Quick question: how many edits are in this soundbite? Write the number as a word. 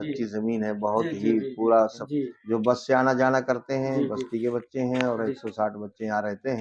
one